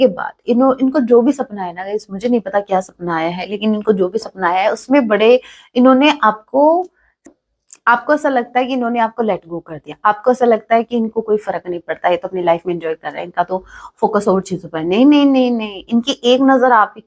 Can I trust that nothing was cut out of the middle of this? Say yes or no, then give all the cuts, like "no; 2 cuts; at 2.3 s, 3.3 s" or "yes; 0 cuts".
no; 1 cut; at 7.3 s